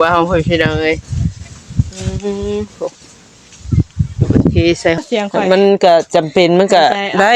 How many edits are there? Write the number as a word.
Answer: one